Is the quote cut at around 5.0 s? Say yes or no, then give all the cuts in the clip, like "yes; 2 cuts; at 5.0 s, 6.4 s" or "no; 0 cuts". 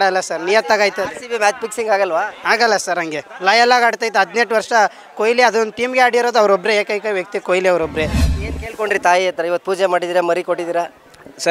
no; 1 cut; at 8.2 s